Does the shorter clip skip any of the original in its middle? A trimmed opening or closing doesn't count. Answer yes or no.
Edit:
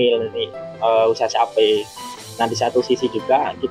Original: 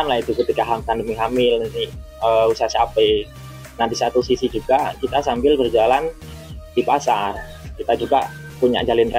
no